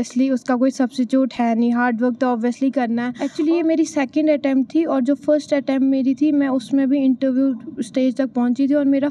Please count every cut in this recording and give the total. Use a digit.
1